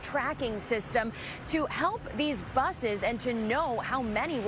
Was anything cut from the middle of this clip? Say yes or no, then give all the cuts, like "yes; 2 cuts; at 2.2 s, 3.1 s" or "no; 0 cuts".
no; 0 cuts